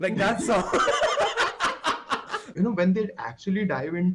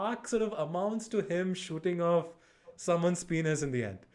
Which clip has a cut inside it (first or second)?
first